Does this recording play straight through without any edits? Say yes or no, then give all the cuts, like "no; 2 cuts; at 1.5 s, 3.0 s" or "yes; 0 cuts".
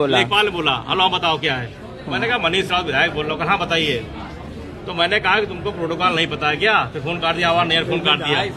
yes; 0 cuts